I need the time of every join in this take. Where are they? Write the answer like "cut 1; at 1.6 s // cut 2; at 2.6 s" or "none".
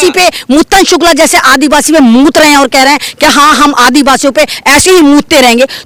none